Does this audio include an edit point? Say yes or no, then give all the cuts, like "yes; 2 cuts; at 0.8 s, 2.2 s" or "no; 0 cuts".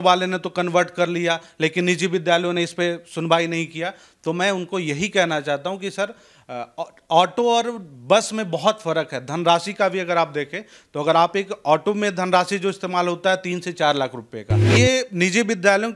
yes; 1 cut; at 14.7 s